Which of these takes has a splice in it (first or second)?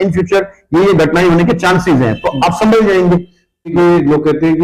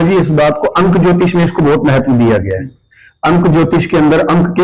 first